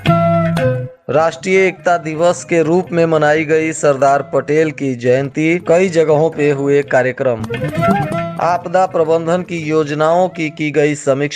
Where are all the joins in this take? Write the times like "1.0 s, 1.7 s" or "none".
0.9 s